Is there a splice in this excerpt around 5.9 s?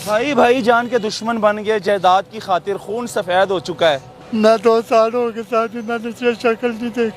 no; 1 cut; at 4.1 s

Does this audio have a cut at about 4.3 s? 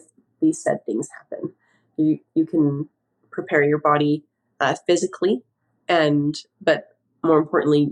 no; 0 cuts

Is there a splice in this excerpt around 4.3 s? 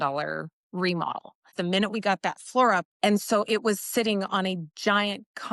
no; 2 cuts; at 1.5 s, 2.9 s

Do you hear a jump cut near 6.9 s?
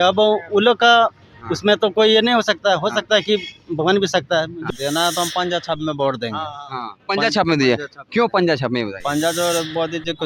no; 1 cut; at 4.6 s

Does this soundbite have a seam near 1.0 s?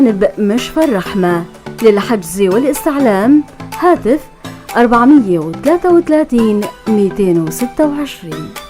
yes; 1 cut; at 1.0 s

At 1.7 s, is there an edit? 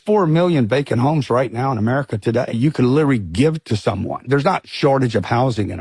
no; 0 cuts

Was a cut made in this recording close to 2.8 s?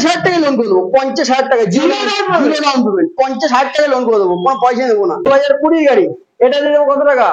no; 1 cut; at 5.2 s

